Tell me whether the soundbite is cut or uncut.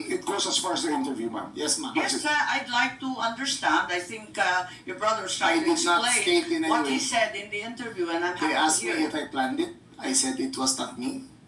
cut